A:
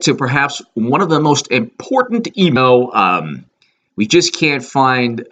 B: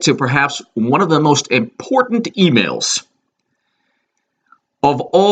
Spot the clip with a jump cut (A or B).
B